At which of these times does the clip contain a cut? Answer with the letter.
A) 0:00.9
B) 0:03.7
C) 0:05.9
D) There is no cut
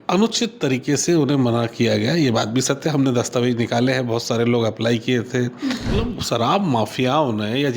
C